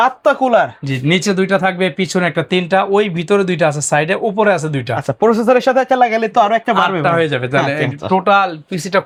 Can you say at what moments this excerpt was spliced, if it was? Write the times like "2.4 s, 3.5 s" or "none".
none